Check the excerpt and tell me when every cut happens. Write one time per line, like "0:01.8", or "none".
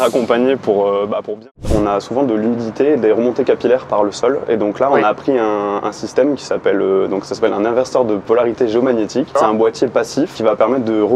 0:01.7
0:08.2
0:09.4
0:10.4